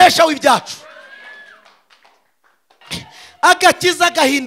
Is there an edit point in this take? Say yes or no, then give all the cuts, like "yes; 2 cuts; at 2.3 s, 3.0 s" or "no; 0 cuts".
yes; 1 cut; at 2.8 s